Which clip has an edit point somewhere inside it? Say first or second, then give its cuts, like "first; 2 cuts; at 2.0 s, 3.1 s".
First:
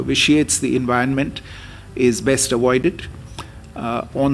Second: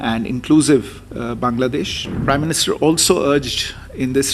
second; 1 cut; at 2.1 s